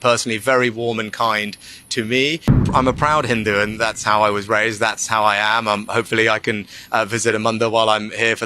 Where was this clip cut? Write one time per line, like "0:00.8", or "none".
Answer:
0:02.6

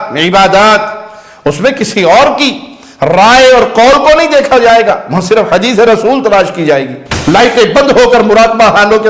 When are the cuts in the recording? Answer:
0:07.0

